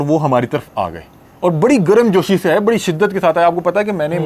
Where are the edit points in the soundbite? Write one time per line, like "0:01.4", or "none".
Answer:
none